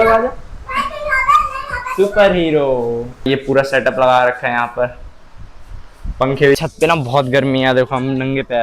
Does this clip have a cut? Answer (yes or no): yes